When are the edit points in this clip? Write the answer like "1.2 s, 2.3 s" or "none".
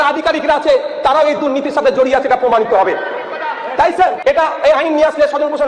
4.2 s